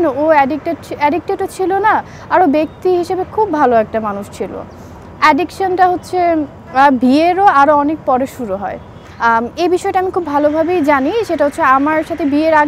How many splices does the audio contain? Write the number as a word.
one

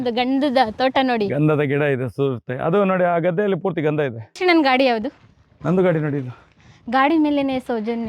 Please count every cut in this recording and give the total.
one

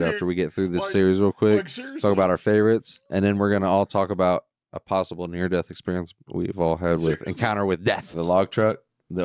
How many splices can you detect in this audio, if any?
one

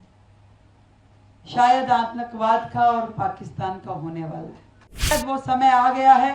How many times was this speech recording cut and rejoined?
one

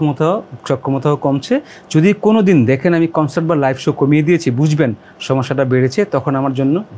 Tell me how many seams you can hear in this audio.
zero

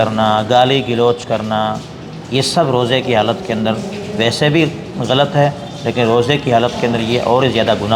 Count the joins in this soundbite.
zero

